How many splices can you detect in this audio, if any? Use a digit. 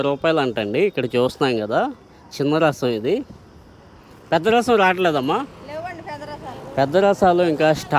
0